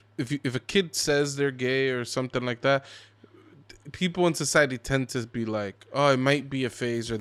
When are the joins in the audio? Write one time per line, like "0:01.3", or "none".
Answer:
none